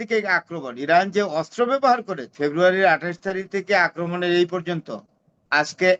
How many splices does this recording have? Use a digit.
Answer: 1